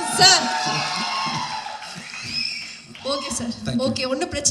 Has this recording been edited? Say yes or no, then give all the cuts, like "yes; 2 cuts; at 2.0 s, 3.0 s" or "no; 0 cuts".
no; 0 cuts